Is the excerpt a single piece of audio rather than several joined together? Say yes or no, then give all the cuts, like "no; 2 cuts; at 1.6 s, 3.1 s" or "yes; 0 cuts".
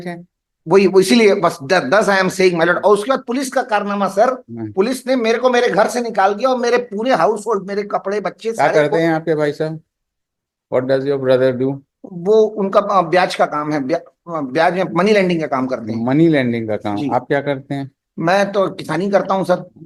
yes; 0 cuts